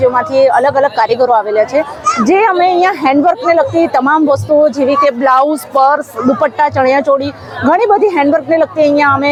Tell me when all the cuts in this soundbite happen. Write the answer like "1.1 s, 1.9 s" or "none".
none